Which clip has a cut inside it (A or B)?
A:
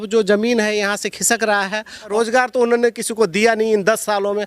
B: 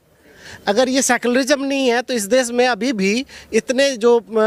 A